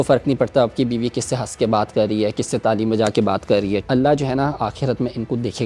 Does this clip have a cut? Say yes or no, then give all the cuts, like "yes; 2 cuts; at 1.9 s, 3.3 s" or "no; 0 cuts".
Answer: yes; 1 cut; at 3.8 s